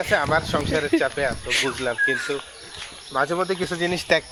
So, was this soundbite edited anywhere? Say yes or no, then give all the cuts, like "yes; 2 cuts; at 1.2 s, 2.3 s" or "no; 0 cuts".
no; 0 cuts